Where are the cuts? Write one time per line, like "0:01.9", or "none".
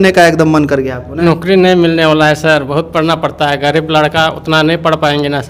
0:01.1